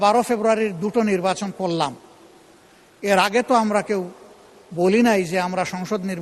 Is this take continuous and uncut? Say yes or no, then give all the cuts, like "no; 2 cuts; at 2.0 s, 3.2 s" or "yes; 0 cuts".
yes; 0 cuts